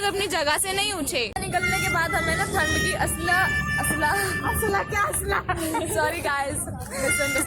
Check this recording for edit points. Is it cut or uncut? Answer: uncut